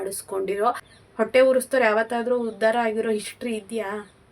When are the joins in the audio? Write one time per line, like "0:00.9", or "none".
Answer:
0:00.9